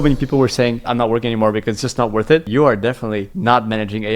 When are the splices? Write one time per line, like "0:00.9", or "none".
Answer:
0:00.8
0:02.5